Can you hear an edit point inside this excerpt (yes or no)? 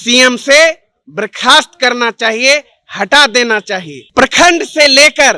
yes